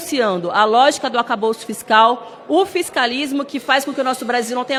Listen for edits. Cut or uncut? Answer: uncut